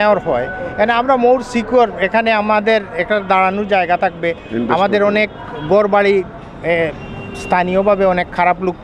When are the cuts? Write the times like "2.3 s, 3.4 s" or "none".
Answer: none